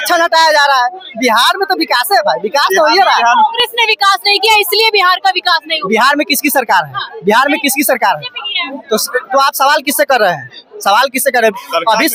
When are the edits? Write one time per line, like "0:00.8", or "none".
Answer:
none